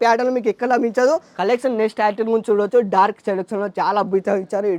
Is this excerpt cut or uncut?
cut